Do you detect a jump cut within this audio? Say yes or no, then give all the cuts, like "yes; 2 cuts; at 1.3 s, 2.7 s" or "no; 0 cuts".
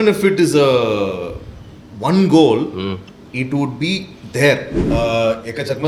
yes; 1 cut; at 4.8 s